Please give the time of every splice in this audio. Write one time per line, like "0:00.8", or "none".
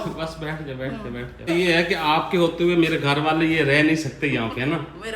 0:01.3